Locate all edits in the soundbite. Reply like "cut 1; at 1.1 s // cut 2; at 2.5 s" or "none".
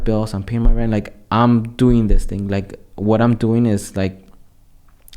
none